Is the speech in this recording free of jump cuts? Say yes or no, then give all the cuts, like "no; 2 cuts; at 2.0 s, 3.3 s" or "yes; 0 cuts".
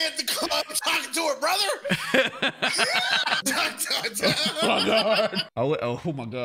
no; 2 cuts; at 3.4 s, 5.4 s